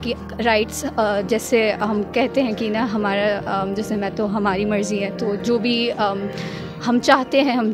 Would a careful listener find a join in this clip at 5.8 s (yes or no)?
no